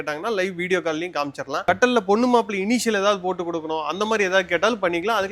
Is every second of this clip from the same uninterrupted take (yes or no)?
yes